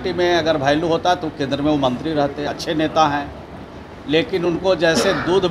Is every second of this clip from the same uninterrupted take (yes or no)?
yes